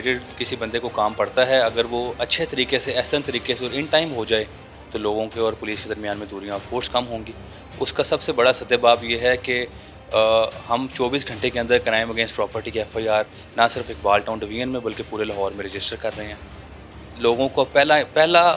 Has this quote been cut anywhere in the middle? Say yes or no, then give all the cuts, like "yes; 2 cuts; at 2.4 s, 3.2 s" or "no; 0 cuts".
no; 0 cuts